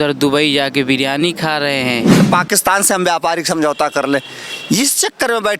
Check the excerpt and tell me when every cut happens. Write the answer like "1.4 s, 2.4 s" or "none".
2.2 s

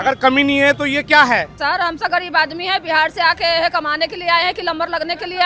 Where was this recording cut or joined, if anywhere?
1.6 s

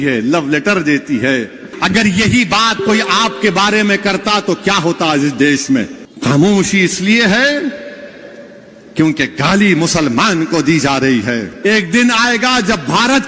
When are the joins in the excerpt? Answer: 1.7 s, 6.0 s, 11.5 s

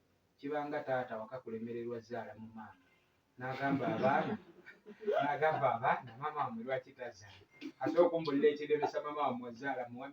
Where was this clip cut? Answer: none

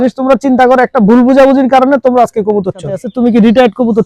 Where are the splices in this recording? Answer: 3.0 s

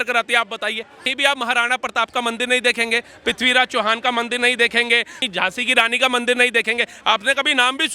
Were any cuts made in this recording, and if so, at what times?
1.1 s, 5.2 s

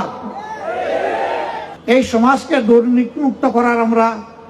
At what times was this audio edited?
1.7 s

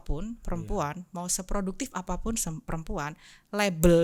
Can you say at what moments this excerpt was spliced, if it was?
none

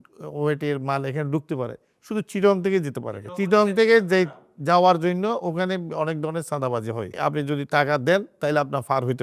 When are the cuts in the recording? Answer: 7.1 s

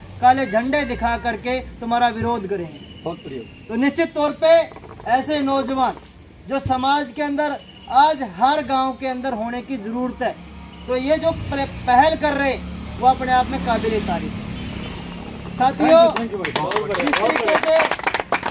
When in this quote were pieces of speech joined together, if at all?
none

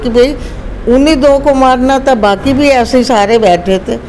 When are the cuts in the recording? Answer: none

